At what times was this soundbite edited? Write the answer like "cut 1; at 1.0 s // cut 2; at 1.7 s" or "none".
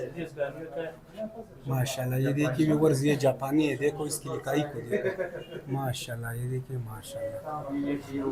none